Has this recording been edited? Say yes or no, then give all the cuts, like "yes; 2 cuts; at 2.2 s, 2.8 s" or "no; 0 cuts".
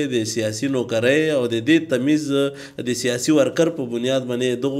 no; 0 cuts